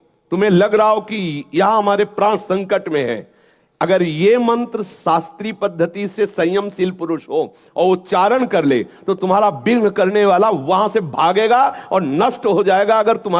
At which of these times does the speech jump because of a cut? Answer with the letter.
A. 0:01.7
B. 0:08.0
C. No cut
C